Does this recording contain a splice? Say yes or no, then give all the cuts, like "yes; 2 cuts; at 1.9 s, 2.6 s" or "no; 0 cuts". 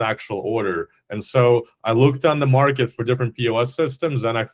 no; 0 cuts